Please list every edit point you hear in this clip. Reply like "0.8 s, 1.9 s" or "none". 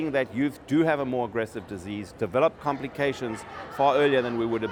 none